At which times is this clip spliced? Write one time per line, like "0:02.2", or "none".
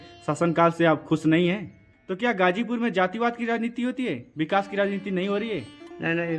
0:01.8